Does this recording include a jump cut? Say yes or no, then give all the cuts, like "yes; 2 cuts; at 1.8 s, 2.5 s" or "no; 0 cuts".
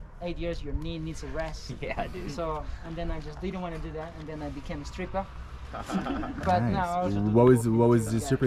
no; 0 cuts